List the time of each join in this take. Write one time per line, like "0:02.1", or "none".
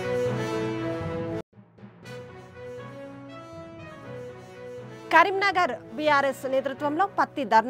0:01.0